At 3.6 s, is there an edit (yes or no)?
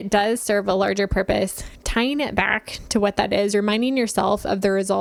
no